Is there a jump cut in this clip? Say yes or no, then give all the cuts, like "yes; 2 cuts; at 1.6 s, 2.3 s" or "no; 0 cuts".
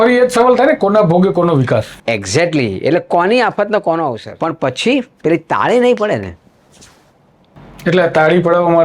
yes; 1 cut; at 4.3 s